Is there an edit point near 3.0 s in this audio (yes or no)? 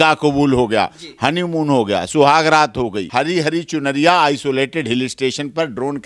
yes